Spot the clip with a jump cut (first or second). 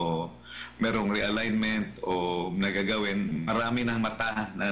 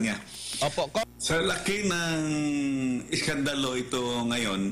second